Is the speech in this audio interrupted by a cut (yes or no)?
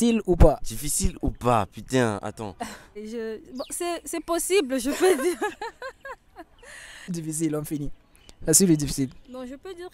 yes